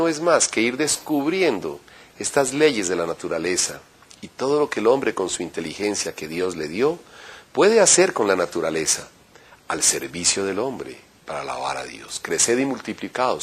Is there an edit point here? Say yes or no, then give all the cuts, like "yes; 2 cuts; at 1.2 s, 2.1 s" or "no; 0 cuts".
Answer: yes; 1 cut; at 1.8 s